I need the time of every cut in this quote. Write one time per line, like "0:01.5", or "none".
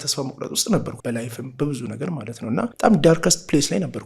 0:00.9
0:02.7